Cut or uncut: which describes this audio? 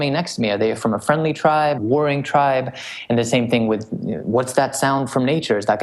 cut